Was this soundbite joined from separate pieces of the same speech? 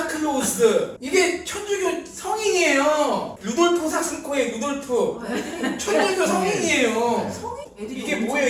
yes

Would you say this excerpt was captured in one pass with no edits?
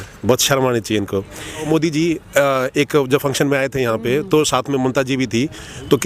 no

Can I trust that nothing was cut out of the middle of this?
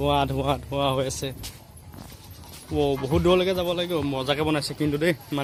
yes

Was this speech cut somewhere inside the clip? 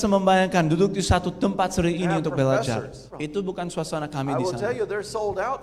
yes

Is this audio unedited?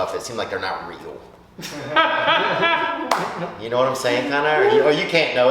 yes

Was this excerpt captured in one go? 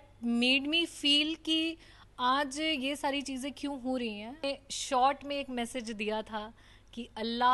no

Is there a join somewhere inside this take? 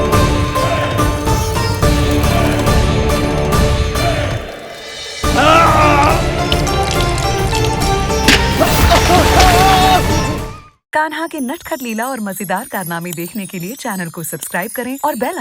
yes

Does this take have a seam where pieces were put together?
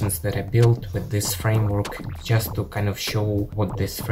no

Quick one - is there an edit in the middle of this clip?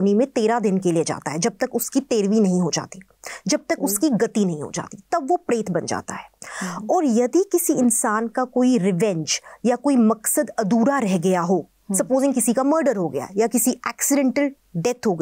no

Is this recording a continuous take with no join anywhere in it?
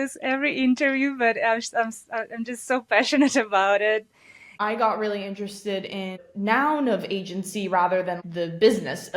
no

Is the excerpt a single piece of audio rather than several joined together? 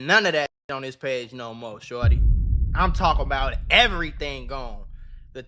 yes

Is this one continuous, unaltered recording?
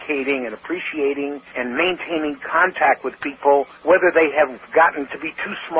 no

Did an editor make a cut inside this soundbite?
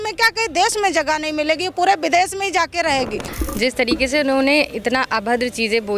yes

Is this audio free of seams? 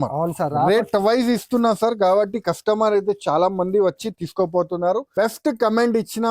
no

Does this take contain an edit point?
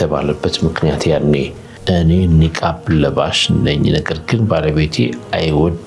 yes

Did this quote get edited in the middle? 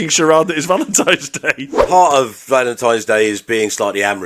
yes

